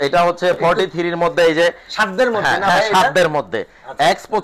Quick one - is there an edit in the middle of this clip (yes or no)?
no